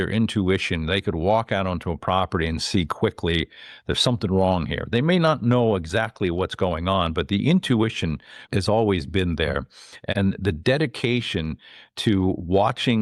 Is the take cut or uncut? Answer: cut